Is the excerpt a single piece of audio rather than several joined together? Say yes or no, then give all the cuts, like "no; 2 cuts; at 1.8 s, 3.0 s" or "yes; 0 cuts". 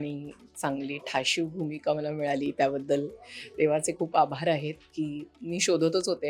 yes; 0 cuts